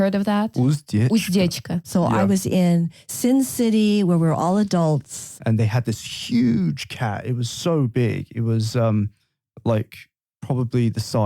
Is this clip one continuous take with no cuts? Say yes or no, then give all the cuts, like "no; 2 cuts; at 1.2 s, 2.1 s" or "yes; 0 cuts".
no; 2 cuts; at 1.9 s, 5.2 s